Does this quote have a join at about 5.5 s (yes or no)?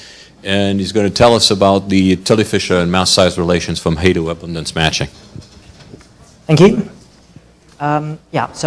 no